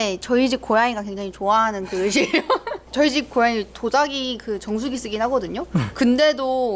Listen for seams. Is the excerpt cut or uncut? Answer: uncut